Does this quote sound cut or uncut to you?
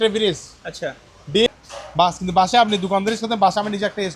cut